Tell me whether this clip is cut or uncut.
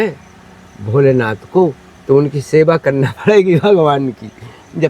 cut